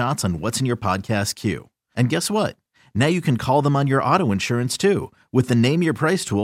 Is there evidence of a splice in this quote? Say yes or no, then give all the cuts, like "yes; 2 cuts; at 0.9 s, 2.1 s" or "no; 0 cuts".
no; 0 cuts